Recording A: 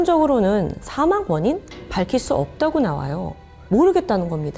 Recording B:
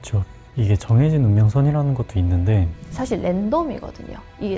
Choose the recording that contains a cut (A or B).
B